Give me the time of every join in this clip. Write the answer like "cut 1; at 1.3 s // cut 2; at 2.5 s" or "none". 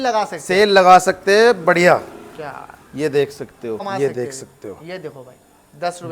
cut 1; at 3.8 s